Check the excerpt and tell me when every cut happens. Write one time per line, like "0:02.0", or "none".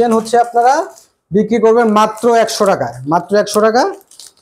none